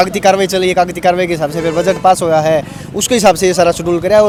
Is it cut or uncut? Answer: uncut